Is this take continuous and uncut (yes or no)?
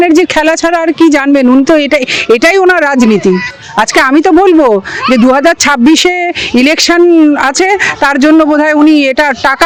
yes